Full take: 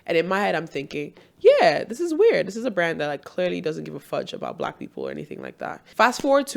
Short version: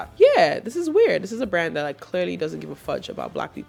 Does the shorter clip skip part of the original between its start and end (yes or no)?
no